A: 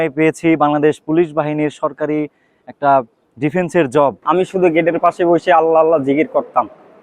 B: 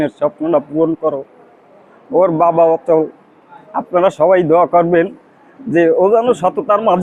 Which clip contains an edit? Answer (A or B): A